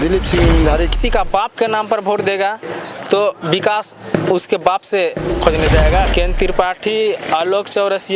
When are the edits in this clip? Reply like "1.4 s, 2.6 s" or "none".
0.9 s, 6.1 s